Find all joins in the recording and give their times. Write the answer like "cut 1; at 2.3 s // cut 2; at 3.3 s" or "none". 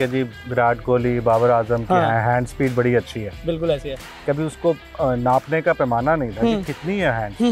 cut 1; at 4.0 s